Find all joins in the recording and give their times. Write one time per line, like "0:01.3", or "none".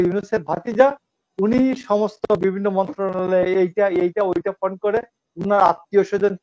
none